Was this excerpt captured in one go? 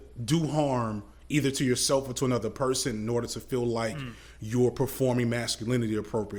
yes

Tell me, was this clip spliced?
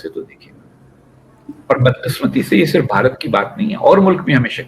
no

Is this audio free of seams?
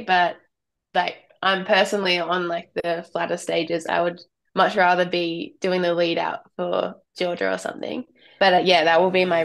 no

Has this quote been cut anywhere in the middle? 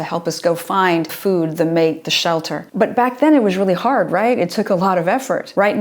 yes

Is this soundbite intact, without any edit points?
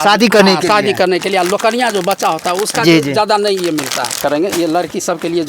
no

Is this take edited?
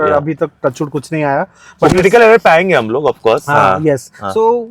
no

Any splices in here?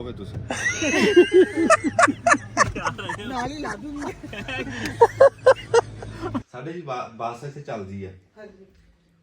yes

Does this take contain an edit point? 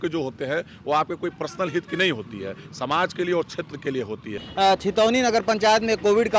yes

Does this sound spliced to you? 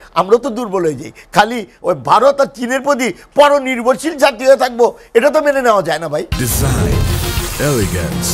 no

